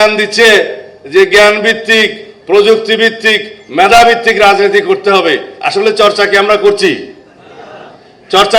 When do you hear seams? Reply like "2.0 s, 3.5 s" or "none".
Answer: none